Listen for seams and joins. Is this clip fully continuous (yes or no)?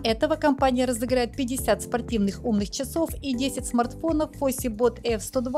yes